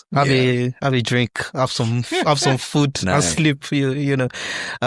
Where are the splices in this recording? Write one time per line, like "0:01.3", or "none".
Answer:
none